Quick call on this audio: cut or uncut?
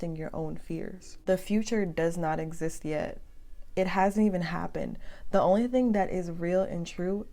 uncut